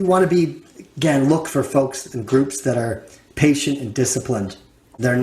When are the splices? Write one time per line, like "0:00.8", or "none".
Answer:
0:01.5

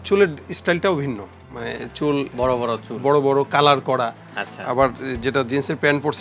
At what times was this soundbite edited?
none

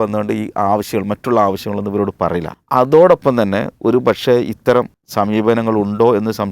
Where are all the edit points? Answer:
0:02.5
0:05.0

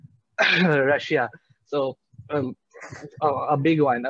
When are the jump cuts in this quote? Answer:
none

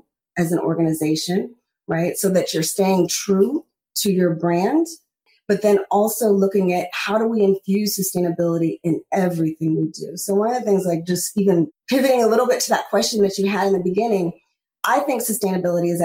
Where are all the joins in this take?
0:05.3

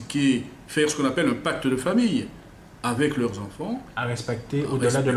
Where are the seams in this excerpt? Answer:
none

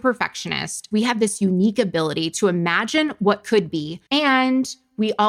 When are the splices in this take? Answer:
none

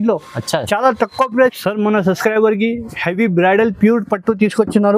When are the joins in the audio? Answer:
0:01.4

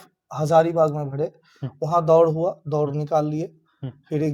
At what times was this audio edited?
none

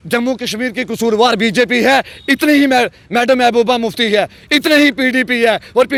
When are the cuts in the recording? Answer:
none

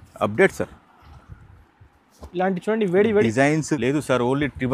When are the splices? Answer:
0:03.7

